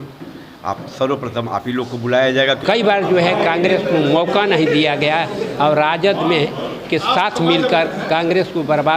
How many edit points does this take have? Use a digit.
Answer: 1